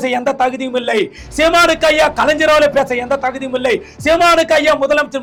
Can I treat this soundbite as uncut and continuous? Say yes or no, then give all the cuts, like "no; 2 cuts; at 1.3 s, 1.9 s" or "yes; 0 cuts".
yes; 0 cuts